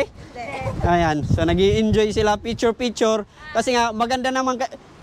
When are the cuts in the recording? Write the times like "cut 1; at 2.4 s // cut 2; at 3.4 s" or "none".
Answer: none